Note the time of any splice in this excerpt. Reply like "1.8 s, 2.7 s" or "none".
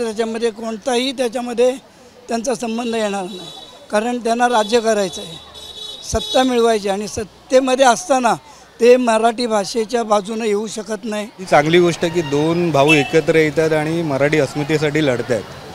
11.5 s